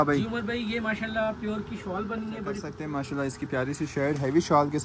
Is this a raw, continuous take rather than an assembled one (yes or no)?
no